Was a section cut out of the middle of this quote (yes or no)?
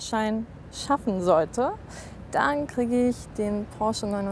no